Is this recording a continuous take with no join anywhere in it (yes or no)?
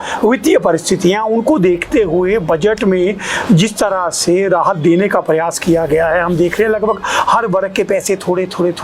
yes